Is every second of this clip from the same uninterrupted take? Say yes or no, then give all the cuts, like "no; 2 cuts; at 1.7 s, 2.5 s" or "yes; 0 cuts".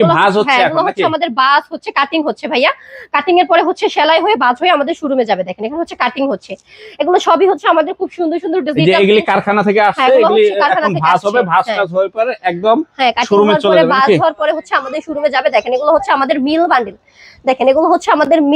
yes; 0 cuts